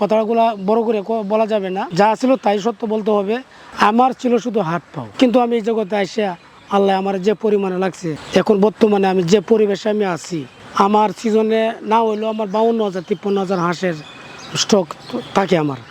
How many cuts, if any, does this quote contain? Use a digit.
2